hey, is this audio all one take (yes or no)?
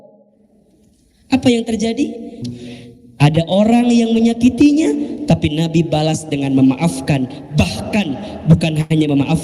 no